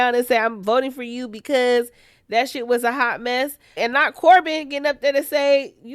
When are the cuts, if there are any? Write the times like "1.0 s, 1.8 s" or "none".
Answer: 3.8 s